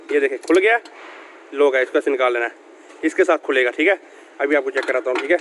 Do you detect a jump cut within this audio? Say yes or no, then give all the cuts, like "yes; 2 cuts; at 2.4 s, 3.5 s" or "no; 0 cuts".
no; 0 cuts